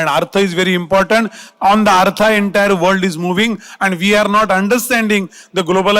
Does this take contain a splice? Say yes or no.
no